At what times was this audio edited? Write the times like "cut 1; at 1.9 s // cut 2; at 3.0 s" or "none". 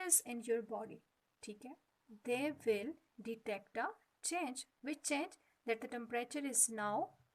cut 1; at 4.7 s

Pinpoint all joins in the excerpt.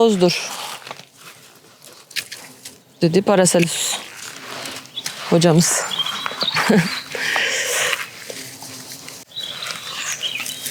cut 1; at 9.3 s

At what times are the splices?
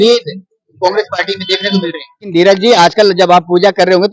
cut 1; at 2.3 s

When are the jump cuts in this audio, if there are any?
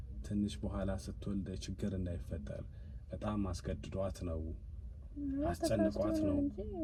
none

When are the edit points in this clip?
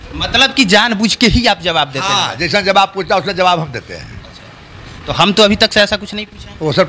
none

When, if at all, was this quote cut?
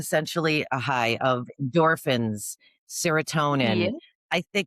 cut 1; at 3.7 s

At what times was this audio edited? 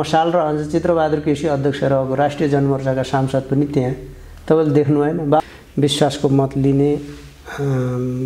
cut 1; at 5.4 s

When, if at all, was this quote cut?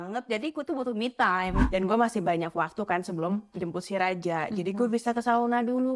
cut 1; at 1.6 s

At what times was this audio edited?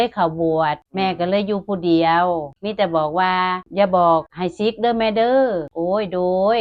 cut 1; at 0.9 s // cut 2; at 2.5 s // cut 3; at 3.6 s // cut 4; at 4.4 s // cut 5; at 5.7 s

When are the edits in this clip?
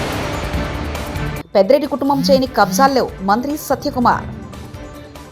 none

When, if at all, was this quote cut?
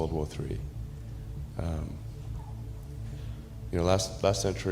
cut 1; at 2.2 s // cut 2; at 3.7 s

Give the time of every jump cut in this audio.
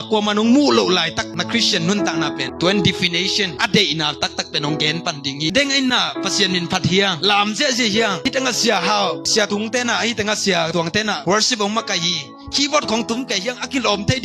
cut 1; at 2.5 s // cut 2; at 5.5 s

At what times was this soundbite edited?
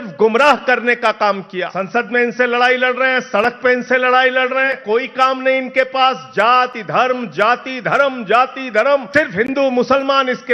cut 1; at 1.8 s // cut 2; at 4.8 s // cut 3; at 9.1 s

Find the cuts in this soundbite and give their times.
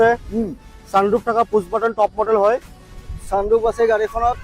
cut 1; at 3.1 s

